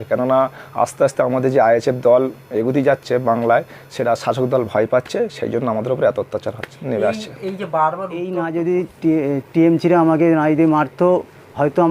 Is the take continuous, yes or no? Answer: no